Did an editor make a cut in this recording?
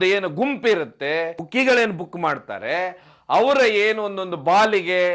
yes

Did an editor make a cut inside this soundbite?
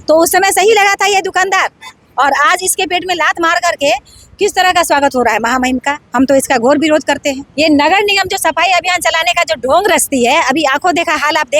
yes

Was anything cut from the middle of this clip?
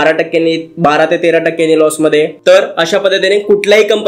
no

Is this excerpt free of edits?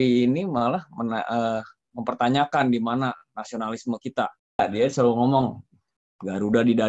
no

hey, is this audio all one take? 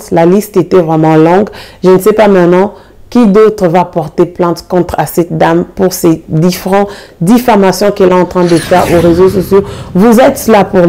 yes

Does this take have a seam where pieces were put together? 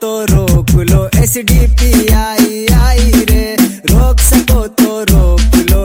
no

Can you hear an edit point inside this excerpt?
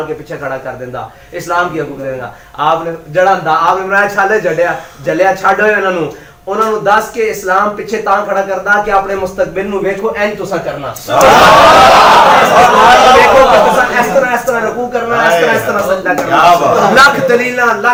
no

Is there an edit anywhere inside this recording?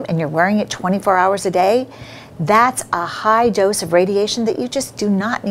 no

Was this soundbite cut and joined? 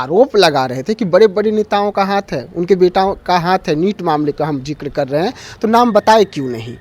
no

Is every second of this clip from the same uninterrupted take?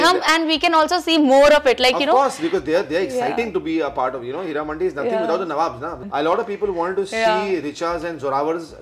no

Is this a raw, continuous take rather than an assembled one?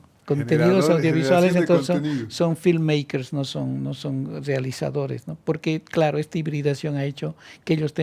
yes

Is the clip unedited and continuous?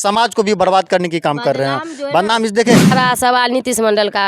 no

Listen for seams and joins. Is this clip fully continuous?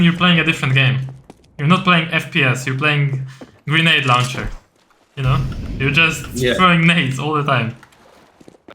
yes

